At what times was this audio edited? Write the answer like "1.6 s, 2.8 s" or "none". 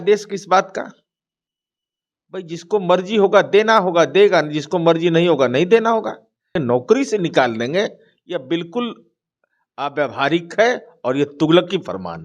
6.5 s